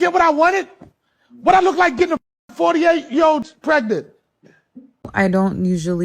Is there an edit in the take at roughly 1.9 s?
no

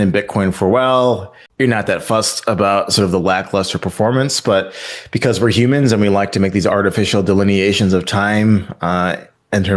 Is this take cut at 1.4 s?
yes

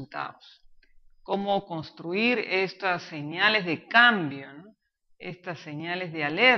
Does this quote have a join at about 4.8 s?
no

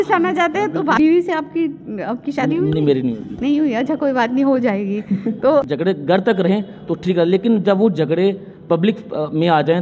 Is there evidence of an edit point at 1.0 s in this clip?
yes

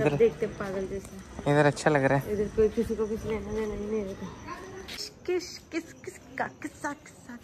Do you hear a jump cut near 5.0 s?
yes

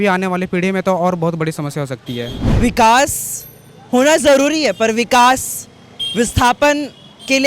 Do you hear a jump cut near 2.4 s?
yes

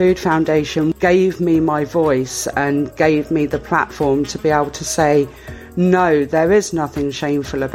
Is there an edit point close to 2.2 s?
no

